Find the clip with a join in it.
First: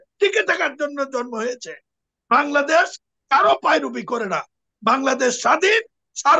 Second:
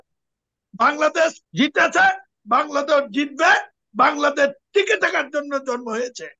second; 1 cut; at 1.4 s

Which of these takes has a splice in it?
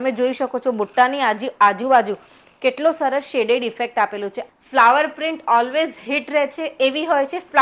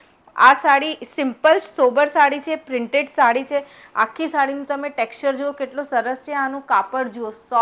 first; 1 cut; at 4.4 s

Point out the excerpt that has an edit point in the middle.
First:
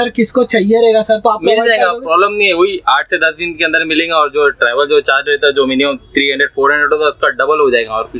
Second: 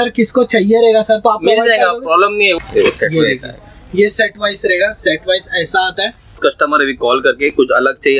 second; 2 cuts; at 2.6 s, 6.4 s

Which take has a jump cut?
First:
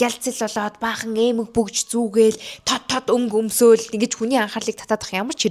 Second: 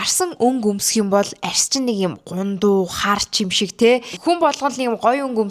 second; 1 cut; at 4.1 s

